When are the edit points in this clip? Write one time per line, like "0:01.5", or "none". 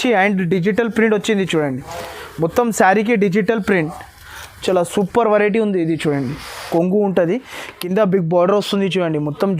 0:06.7